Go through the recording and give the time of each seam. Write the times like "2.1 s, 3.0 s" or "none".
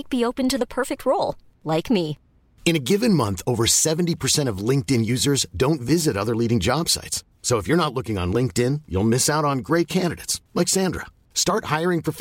none